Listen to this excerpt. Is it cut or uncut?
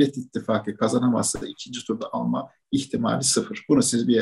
uncut